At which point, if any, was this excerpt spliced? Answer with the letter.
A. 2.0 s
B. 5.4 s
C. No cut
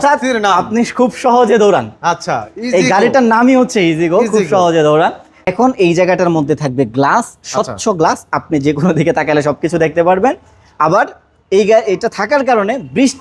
B